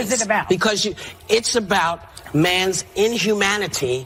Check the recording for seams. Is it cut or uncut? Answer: uncut